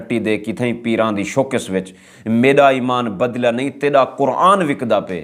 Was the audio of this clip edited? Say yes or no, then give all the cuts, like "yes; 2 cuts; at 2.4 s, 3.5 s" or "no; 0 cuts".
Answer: no; 0 cuts